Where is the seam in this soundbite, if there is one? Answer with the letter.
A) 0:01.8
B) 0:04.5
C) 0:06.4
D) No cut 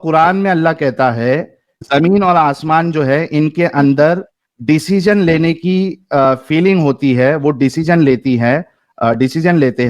A